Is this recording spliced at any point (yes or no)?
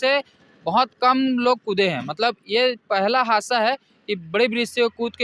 no